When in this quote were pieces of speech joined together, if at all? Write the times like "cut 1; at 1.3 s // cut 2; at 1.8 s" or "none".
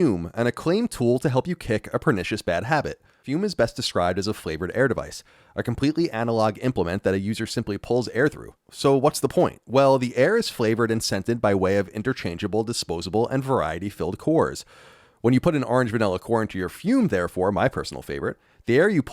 cut 1; at 3.2 s

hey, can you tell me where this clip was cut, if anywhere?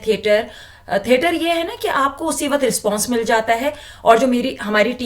none

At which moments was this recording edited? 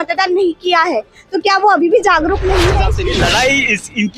cut 1; at 3.0 s

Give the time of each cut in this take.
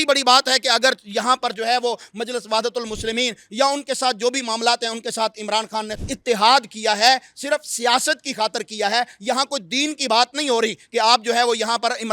cut 1; at 6.0 s

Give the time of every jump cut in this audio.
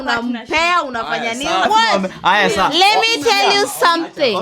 cut 1; at 1.7 s

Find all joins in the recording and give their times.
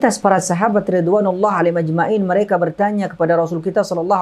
none

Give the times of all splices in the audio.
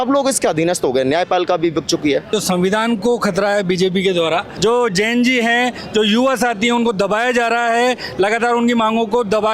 cut 1; at 2.3 s // cut 2; at 4.5 s

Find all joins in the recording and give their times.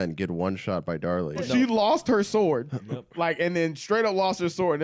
cut 1; at 1.5 s

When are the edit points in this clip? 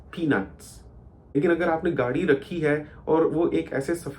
cut 1; at 1.2 s

